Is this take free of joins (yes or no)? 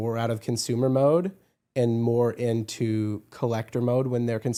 yes